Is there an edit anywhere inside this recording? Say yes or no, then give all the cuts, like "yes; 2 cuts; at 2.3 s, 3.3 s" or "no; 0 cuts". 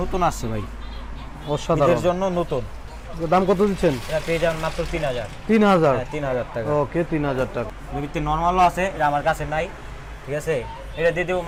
no; 0 cuts